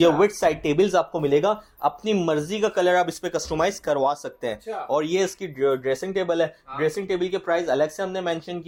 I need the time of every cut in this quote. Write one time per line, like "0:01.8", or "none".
none